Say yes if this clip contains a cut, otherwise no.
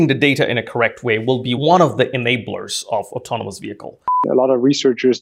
yes